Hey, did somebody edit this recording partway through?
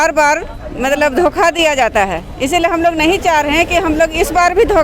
no; 0 cuts

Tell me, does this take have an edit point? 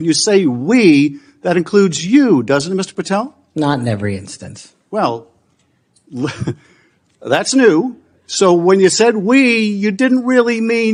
no; 0 cuts

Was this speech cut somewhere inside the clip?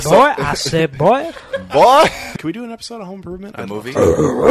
yes; 1 cut; at 2.3 s

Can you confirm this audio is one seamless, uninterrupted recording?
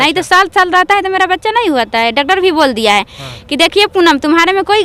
yes; 0 cuts

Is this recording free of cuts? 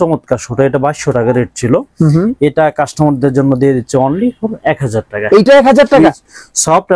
no; 1 cut; at 6.0 s

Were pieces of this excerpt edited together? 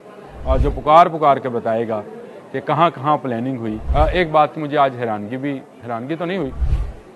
yes; 1 cut; at 3.8 s

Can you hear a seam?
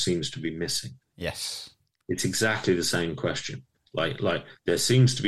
no; 0 cuts

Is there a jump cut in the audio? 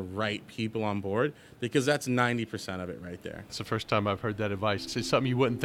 yes; 2 cuts; at 3.6 s, 4.9 s

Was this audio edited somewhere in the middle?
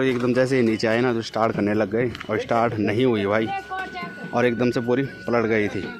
no; 0 cuts

